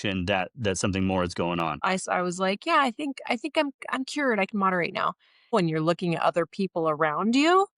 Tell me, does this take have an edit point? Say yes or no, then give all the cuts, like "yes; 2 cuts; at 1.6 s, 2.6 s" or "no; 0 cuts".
yes; 2 cuts; at 1.8 s, 5.5 s